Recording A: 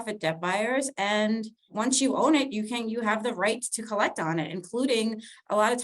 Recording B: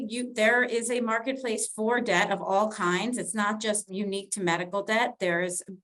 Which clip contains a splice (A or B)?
A